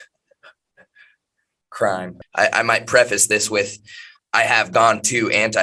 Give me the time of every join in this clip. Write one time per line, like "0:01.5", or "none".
0:02.2